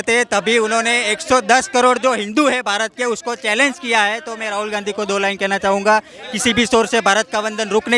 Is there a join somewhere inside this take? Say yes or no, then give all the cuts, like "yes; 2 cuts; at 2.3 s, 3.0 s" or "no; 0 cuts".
no; 0 cuts